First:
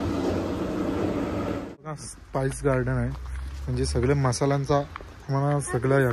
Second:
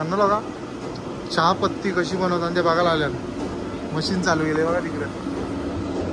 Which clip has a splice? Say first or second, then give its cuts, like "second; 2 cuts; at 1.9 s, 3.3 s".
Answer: first; 1 cut; at 1.6 s